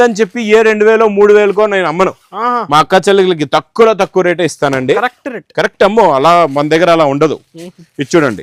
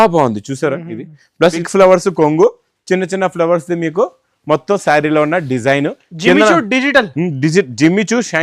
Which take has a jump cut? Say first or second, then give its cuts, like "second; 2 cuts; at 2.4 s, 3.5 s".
second; 1 cut; at 1.6 s